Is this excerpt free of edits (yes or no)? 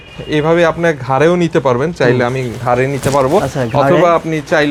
yes